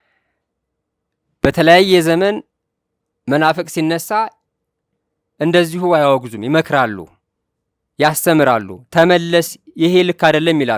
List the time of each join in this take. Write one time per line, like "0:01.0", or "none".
none